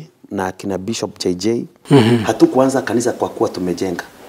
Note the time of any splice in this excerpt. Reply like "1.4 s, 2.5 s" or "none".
1.7 s